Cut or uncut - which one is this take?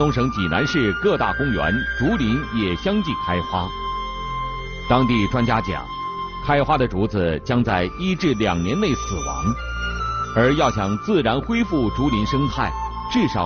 cut